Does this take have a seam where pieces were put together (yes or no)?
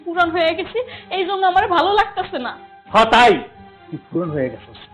no